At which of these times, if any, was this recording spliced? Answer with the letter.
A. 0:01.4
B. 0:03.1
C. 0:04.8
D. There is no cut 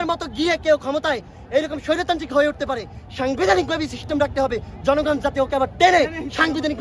D